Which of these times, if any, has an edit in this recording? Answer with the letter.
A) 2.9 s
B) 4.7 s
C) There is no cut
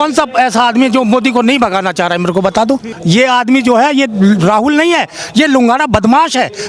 A